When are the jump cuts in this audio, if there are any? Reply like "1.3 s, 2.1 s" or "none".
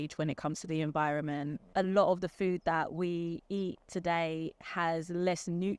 1.7 s